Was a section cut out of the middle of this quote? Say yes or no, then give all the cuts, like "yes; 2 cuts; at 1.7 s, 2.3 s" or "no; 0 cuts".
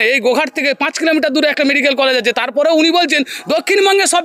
no; 0 cuts